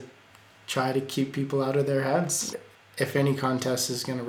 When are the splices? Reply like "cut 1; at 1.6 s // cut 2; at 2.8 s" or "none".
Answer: cut 1; at 2.5 s